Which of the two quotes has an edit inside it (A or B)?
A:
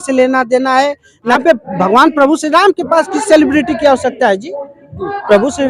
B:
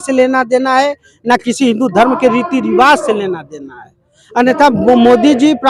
A